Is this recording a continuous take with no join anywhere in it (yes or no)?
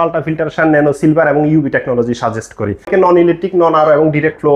no